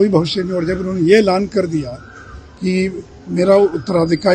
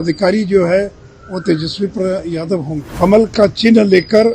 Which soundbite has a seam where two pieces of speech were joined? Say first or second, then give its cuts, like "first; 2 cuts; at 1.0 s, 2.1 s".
second; 1 cut; at 2.9 s